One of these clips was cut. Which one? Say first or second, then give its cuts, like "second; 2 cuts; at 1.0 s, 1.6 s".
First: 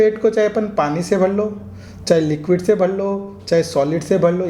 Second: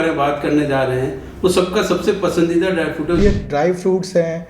second; 1 cut; at 3.2 s